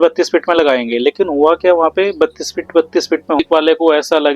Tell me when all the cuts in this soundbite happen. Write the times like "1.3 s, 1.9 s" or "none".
3.4 s